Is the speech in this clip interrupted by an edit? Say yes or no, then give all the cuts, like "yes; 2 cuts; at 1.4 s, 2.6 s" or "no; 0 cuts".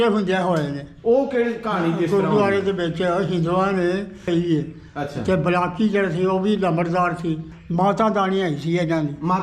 yes; 2 cuts; at 4.2 s, 7.5 s